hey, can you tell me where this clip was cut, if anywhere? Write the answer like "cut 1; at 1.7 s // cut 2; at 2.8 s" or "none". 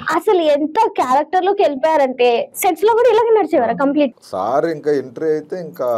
cut 1; at 4.2 s